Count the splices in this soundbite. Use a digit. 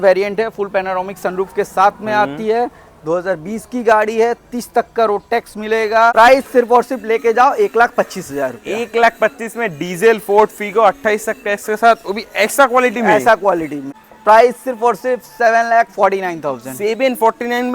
2